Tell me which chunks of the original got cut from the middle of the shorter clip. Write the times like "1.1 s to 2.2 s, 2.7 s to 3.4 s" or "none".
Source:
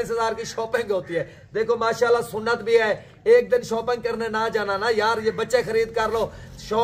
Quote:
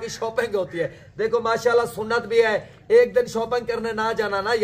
none